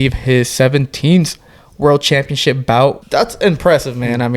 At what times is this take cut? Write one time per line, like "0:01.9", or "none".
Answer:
0:03.0